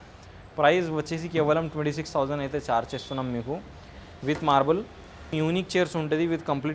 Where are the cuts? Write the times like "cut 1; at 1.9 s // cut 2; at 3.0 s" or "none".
cut 1; at 5.3 s